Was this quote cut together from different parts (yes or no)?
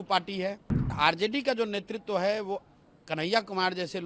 yes